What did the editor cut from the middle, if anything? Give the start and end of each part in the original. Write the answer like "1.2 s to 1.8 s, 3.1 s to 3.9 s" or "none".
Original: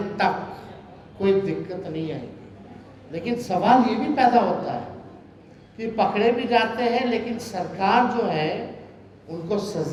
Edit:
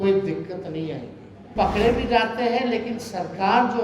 2.7 s to 5.9 s